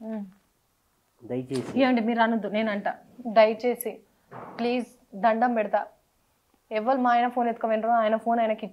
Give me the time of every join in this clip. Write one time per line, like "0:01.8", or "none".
none